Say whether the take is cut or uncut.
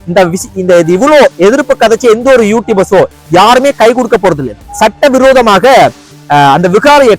cut